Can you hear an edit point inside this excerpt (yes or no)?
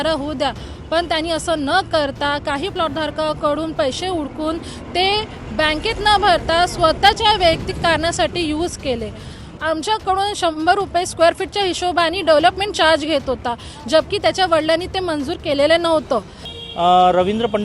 yes